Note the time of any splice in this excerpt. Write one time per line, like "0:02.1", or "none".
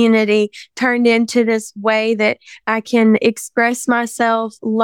0:03.2